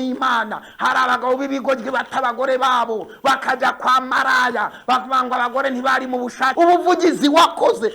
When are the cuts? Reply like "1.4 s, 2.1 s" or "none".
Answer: 6.5 s